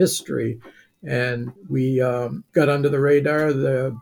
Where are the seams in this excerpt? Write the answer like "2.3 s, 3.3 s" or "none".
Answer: 1.5 s, 2.4 s